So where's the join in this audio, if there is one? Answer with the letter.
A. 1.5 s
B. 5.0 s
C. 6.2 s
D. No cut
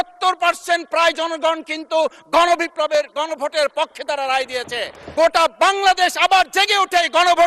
B